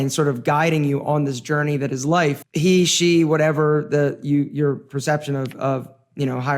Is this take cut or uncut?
cut